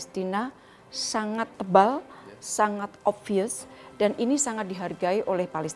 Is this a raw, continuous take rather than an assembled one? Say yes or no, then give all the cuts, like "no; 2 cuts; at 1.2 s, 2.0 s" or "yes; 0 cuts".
no; 1 cut; at 1.6 s